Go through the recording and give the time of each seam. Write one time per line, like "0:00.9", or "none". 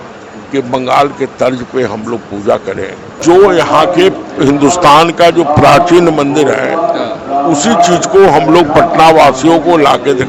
0:03.1